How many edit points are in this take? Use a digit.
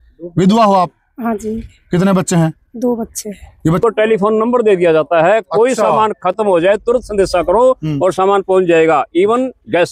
1